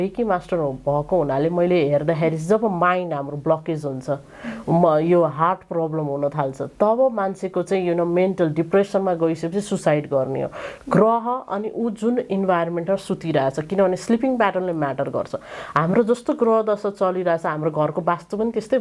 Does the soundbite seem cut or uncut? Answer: uncut